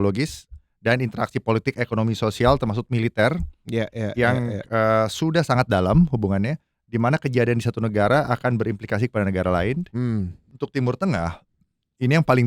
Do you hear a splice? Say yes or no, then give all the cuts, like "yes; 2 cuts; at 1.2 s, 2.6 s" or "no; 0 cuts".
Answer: yes; 1 cut; at 10.4 s